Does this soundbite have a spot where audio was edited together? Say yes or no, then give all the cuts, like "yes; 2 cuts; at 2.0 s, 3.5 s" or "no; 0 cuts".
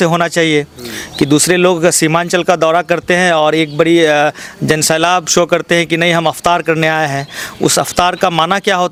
no; 0 cuts